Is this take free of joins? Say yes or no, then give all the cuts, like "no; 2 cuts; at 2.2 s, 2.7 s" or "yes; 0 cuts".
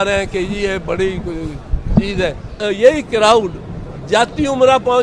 no; 1 cut; at 2.5 s